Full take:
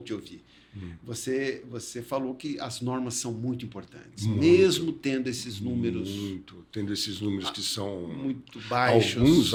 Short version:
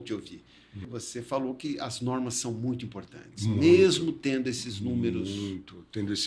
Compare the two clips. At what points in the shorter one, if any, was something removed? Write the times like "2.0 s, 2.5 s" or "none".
0.9 s